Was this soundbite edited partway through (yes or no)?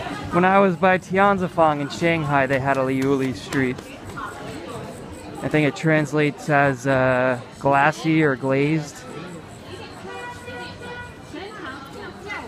yes